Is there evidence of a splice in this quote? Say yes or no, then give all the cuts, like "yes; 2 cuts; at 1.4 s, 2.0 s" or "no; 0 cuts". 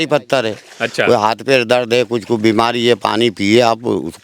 no; 0 cuts